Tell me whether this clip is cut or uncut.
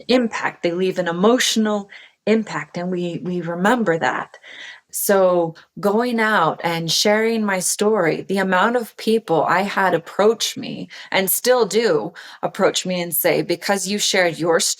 cut